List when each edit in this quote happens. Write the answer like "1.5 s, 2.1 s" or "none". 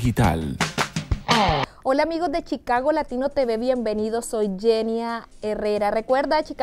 1.5 s